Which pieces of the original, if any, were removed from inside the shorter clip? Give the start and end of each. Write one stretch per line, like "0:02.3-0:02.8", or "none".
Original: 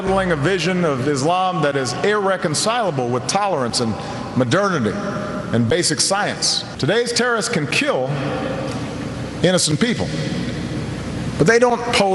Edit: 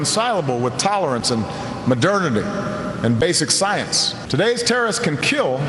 none